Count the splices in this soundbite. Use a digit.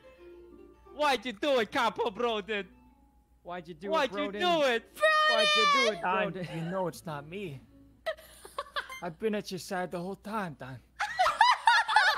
0